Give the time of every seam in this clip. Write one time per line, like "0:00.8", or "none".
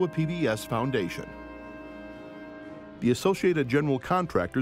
0:01.2
0:03.0